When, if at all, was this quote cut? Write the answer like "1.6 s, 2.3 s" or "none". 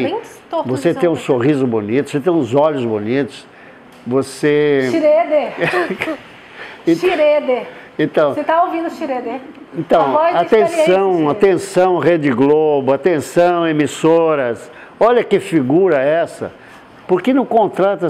none